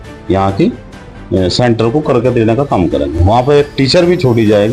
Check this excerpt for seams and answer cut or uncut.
uncut